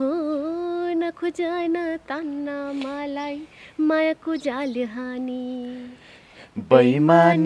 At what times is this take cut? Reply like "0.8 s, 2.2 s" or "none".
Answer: none